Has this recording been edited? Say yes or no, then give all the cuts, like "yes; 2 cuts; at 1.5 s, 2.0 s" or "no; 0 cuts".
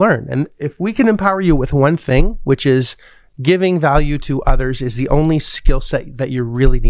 no; 0 cuts